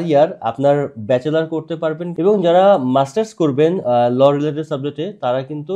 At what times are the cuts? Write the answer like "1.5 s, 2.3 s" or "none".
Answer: 2.1 s